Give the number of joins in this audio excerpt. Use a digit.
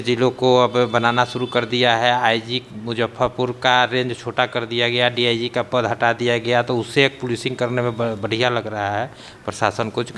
0